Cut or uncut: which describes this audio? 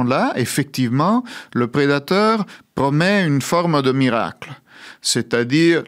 uncut